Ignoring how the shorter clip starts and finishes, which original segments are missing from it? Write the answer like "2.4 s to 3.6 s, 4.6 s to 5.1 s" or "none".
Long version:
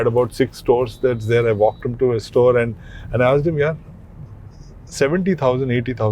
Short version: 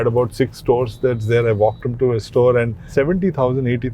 2.8 s to 4.8 s